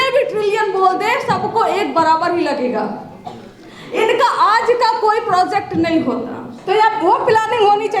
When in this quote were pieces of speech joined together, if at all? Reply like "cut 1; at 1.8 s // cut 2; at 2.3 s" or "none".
cut 1; at 6.5 s